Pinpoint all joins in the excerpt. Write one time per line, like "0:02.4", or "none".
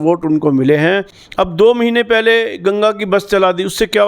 0:01.2